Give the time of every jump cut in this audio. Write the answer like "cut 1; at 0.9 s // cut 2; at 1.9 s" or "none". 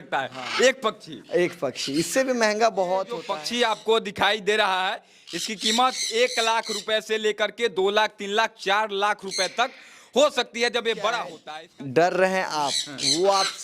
cut 1; at 3.4 s // cut 2; at 11.4 s